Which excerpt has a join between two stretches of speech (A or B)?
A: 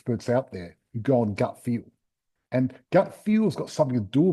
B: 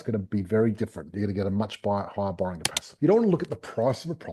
B